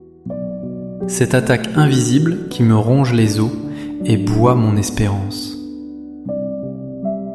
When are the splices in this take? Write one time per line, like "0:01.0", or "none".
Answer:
0:01.0